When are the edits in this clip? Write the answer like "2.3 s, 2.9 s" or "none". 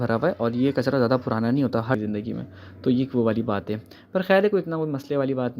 2.0 s